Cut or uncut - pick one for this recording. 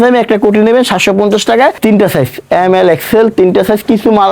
cut